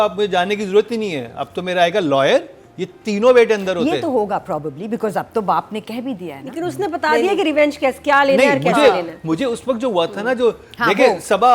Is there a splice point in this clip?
no; 0 cuts

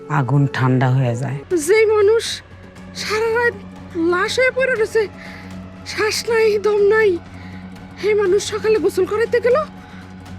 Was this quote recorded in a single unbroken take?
no; 1 cut; at 1.3 s

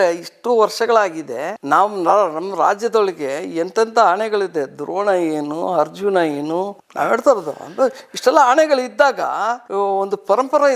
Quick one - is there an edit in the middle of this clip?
yes; 2 cuts; at 6.9 s, 9.6 s

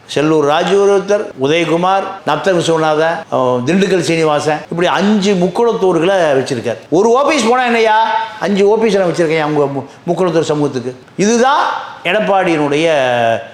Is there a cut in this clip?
no; 0 cuts

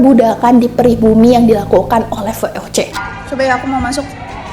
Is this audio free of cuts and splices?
no; 1 cut; at 2.9 s

